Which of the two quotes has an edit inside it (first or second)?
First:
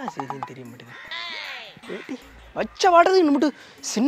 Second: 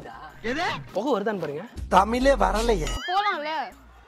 second